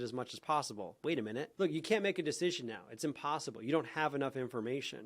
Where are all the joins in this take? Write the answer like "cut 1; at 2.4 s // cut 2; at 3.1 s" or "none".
cut 1; at 1.5 s